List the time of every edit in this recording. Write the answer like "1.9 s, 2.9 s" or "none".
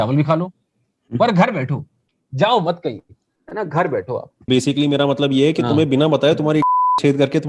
4.5 s